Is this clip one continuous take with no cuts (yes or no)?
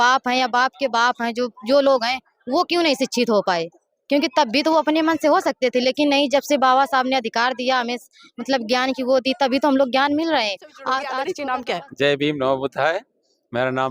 no